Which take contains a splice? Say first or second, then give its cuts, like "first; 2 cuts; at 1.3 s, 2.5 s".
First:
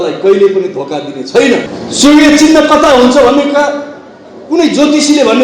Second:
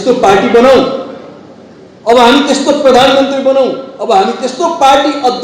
first; 1 cut; at 1.7 s